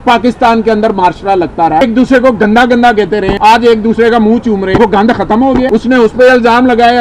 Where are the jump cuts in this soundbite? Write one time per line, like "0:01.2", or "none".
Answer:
0:01.8
0:03.3
0:04.8
0:05.7